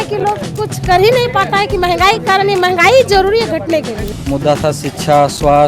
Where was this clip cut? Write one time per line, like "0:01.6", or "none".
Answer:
0:04.1